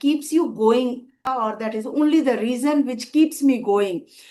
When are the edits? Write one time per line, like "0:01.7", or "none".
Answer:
0:01.1